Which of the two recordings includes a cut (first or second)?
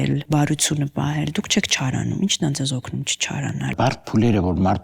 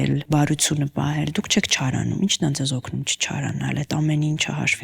first